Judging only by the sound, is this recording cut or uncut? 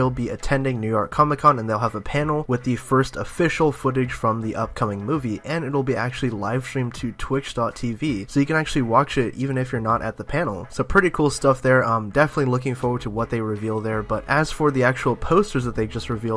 uncut